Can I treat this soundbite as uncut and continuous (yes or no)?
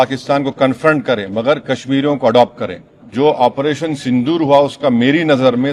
no